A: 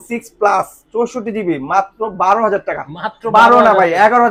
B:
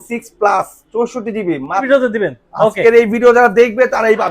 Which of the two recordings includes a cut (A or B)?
B